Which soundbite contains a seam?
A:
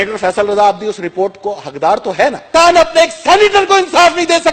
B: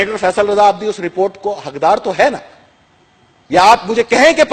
A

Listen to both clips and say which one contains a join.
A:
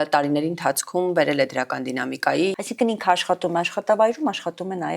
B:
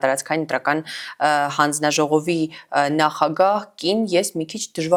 A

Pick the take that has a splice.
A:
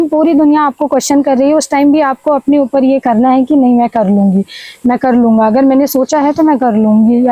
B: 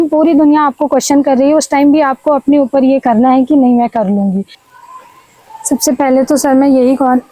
B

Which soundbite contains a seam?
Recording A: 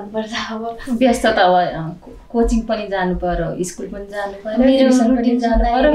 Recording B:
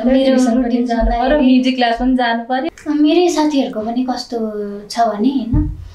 B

